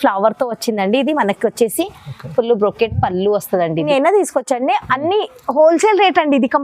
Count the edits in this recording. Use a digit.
1